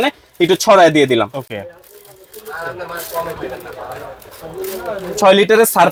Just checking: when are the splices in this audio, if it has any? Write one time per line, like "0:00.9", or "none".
none

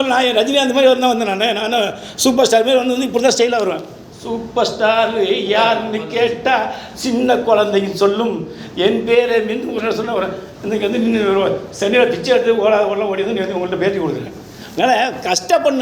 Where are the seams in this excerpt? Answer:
none

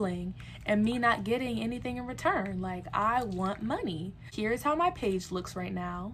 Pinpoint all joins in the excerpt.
0:04.2

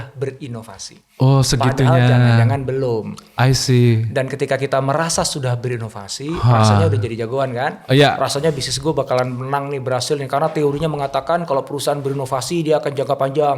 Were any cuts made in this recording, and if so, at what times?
none

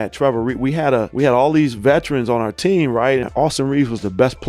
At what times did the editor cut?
0:03.3

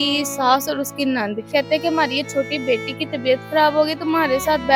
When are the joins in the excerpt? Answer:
0:01.5

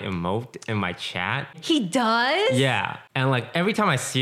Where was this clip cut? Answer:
0:01.6
0:03.0

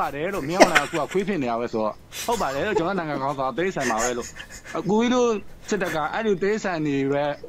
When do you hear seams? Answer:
0:04.6

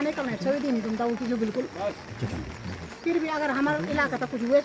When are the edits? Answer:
none

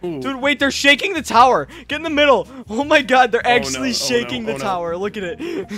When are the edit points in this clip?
none

